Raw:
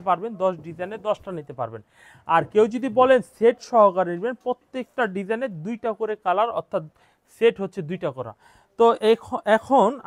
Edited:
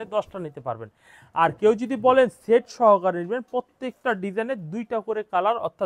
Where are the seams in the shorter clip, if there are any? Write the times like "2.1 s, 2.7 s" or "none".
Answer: none